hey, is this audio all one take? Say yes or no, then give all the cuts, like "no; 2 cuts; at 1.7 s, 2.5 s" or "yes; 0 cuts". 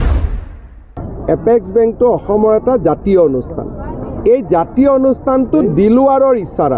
yes; 0 cuts